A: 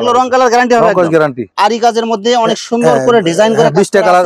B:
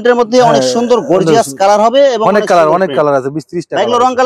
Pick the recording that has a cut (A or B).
A